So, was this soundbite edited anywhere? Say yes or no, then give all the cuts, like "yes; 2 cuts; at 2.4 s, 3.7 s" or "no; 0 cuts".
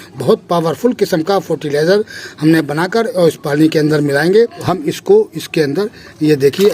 yes; 1 cut; at 4.7 s